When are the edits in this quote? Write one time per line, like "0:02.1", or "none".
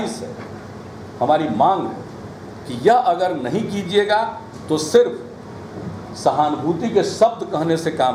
none